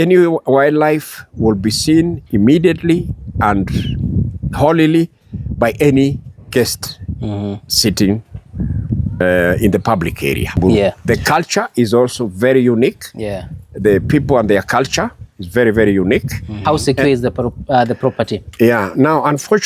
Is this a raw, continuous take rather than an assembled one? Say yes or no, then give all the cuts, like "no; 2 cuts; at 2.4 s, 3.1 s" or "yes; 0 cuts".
no; 2 cuts; at 11.0 s, 16.5 s